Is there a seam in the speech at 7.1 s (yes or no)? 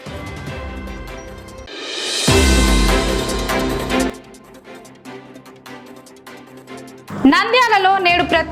yes